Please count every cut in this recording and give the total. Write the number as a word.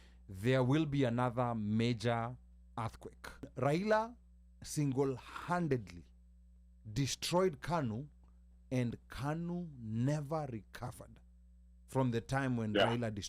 one